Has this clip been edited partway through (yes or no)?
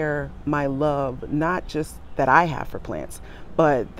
no